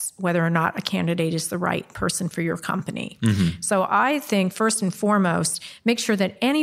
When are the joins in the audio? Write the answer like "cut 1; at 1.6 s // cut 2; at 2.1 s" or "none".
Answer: none